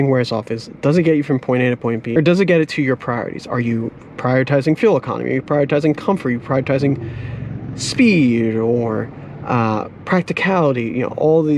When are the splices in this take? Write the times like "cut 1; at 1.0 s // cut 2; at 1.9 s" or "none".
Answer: none